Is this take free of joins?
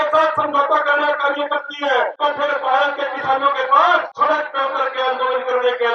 no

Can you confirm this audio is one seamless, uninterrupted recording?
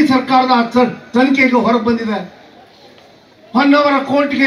yes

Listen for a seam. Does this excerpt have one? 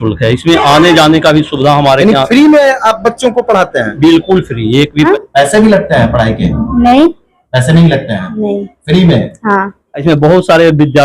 yes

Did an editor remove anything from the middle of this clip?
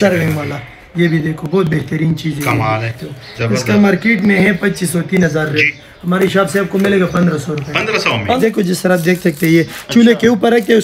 yes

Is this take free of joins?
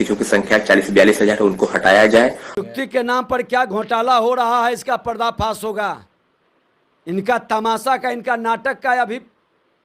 no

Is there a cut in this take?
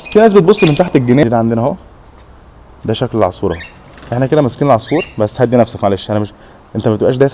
yes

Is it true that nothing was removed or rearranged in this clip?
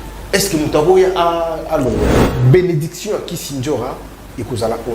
no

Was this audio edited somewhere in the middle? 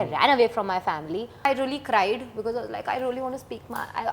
yes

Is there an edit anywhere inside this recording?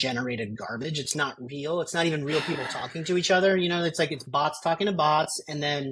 no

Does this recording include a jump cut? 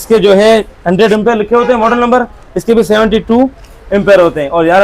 no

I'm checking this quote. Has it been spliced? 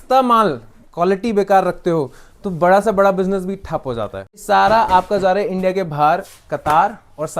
yes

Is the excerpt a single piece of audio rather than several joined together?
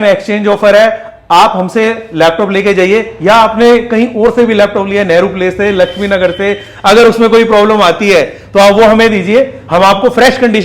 yes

